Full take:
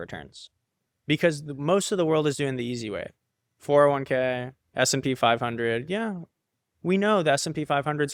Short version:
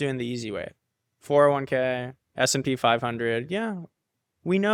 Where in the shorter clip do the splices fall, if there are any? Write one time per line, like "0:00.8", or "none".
none